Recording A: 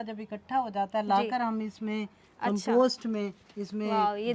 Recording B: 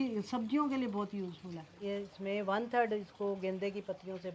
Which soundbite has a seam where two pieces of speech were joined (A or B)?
B